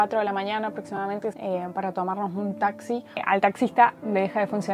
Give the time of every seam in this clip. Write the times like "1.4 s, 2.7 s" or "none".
1.3 s, 3.2 s